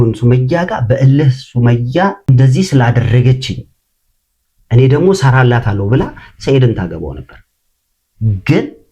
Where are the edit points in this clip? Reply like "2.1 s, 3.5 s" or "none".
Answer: 2.3 s